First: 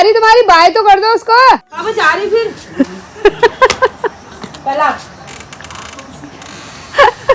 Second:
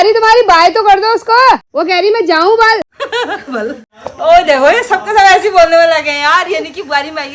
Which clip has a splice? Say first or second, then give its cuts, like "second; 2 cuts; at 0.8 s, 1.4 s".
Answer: first; 1 cut; at 1.7 s